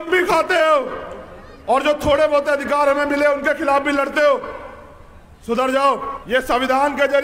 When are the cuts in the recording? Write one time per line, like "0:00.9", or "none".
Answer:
0:06.1